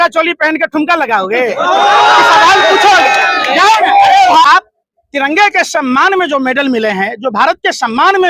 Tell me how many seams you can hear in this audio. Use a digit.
1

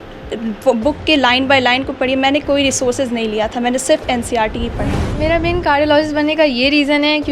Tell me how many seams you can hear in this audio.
1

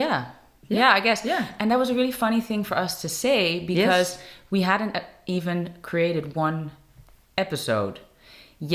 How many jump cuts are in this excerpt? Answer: 0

